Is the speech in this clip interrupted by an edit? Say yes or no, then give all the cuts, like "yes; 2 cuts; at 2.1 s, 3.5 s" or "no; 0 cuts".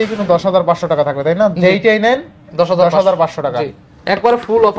no; 0 cuts